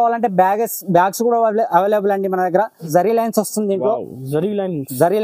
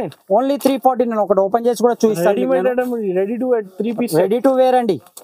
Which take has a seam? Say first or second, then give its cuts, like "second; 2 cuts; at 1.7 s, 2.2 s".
first; 1 cut; at 2.9 s